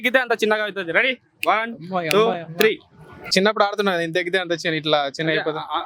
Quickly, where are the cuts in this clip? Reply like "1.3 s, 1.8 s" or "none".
3.3 s